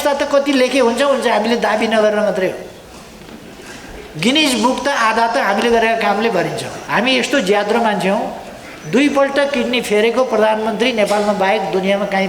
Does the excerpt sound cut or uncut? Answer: cut